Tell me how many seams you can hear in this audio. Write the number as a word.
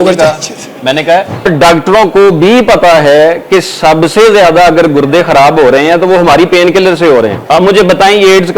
two